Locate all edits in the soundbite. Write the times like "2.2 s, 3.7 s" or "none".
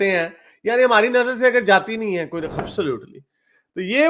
2.6 s

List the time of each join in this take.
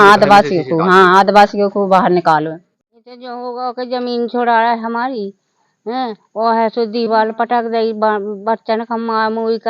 2.6 s

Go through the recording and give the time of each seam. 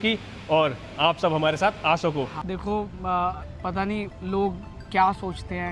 2.4 s, 4.1 s

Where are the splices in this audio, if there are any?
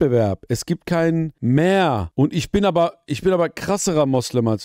1.3 s, 2.0 s

